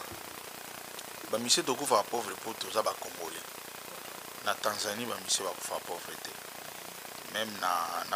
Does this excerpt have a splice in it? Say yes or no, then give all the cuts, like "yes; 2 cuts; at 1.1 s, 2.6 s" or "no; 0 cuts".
no; 0 cuts